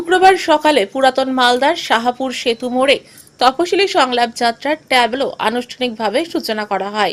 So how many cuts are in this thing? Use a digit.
0